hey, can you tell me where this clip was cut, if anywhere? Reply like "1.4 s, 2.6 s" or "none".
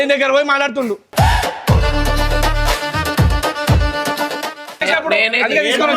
4.8 s